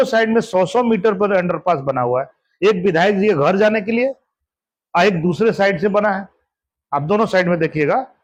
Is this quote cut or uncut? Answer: uncut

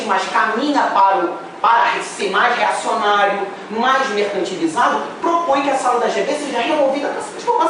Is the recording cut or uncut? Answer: uncut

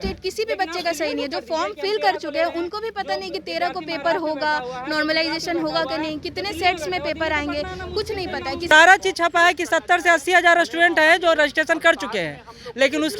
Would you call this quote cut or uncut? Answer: cut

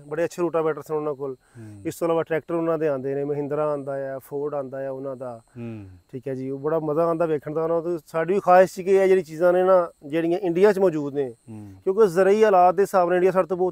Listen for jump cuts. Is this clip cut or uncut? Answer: uncut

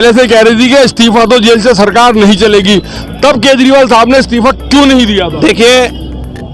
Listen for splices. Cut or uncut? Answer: uncut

